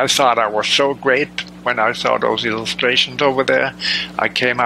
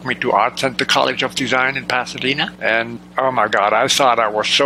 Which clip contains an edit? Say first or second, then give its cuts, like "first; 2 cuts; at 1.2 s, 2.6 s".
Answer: second; 1 cut; at 2.8 s